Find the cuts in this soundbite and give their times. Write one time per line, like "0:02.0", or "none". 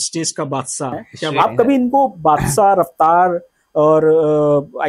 0:01.4